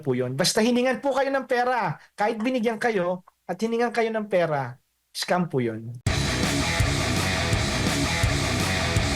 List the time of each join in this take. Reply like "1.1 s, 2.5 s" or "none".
5.9 s